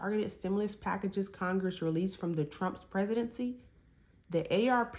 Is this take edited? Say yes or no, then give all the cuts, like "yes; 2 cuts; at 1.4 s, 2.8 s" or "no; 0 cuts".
no; 0 cuts